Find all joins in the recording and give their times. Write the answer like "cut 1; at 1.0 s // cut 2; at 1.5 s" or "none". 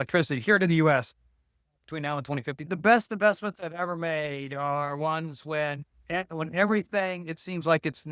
cut 1; at 2.6 s